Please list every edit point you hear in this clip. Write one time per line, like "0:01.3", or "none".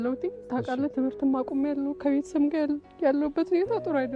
none

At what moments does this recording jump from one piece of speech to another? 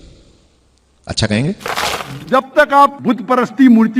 0:02.2

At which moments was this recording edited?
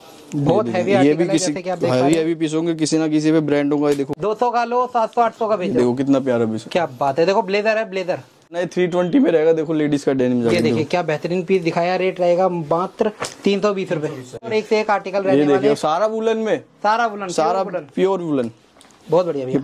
0:04.2
0:08.7
0:14.5

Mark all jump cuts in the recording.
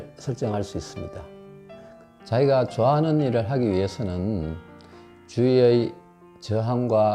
0:01.8

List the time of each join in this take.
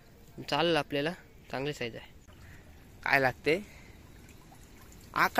0:02.2

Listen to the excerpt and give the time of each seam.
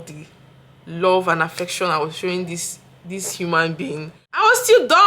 0:04.2

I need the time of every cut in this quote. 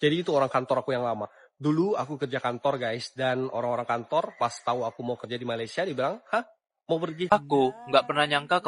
0:07.3

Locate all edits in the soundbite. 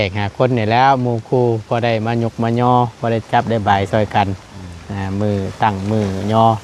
none

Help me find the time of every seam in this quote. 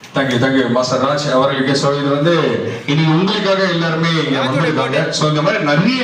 none

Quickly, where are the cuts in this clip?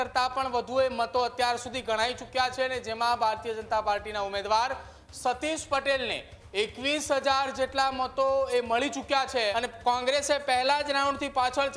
0:09.5

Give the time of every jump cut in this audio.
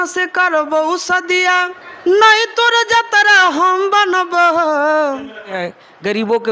0:01.8
0:05.6

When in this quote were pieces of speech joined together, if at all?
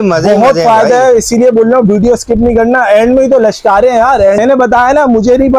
0:04.4

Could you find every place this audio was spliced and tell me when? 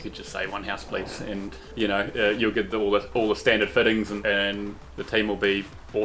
0:01.7
0:04.2

